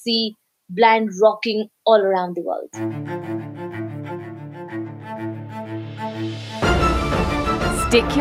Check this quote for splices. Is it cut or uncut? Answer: cut